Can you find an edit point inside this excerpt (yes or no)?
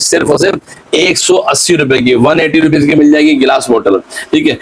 no